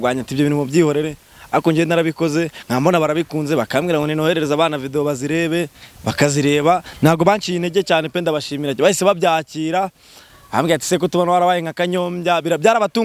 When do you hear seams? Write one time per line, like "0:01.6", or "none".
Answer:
none